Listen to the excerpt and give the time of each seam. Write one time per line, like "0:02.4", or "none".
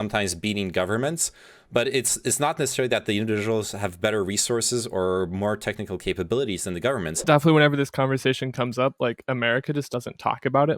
0:07.2

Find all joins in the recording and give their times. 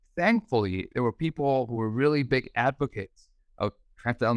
none

